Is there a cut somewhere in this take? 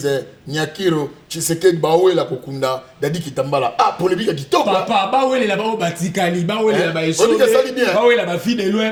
no; 0 cuts

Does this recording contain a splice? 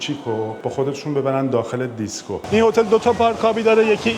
yes; 1 cut; at 2.4 s

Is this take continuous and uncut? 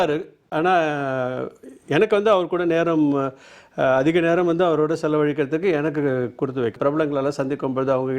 no; 1 cut; at 6.8 s

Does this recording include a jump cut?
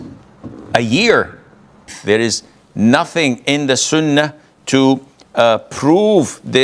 yes; 1 cut; at 1.9 s

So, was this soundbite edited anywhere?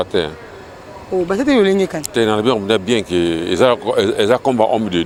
no; 0 cuts

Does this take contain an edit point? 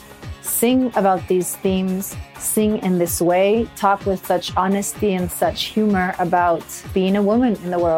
yes; 1 cut; at 6.9 s

